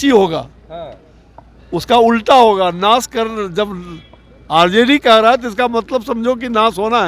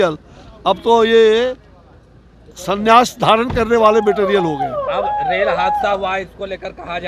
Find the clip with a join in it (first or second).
second